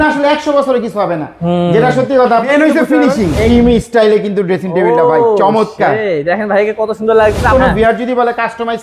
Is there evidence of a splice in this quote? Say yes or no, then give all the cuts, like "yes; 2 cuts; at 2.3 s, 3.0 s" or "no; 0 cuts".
yes; 3 cuts; at 2.5 s, 3.5 s, 7.5 s